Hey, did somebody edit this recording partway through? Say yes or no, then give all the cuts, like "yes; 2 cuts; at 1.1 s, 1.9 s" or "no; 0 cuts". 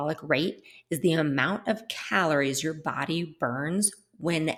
no; 0 cuts